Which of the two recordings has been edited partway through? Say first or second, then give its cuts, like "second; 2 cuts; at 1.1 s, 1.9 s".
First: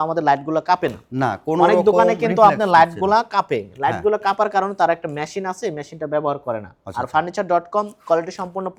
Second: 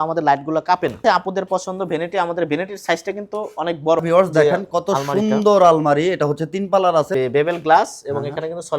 second; 3 cuts; at 1.0 s, 4.0 s, 7.1 s